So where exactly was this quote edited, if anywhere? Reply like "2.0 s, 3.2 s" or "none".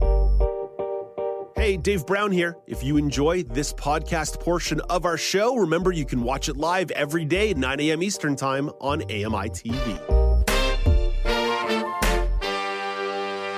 none